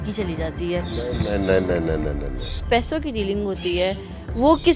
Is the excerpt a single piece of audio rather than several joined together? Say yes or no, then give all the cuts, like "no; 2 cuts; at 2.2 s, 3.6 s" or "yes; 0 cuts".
no; 1 cut; at 2.5 s